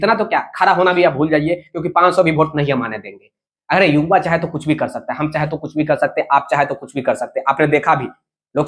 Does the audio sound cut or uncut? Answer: uncut